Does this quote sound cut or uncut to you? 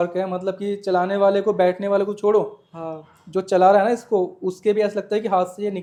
uncut